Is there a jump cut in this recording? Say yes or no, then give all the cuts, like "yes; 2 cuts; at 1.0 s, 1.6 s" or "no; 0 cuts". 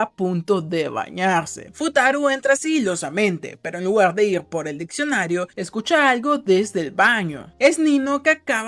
no; 0 cuts